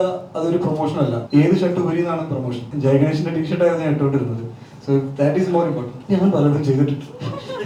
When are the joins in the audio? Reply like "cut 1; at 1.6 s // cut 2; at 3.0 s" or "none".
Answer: cut 1; at 1.2 s // cut 2; at 2.6 s // cut 3; at 5.9 s

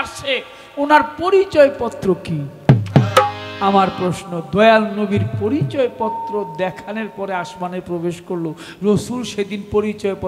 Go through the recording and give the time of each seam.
none

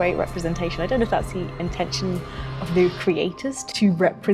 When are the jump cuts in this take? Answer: none

